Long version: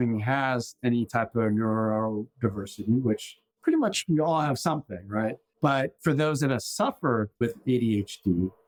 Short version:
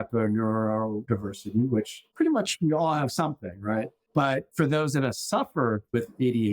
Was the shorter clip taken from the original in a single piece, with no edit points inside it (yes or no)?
no